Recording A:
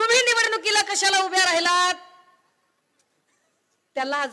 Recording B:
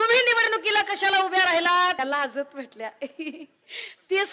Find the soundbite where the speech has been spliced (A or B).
B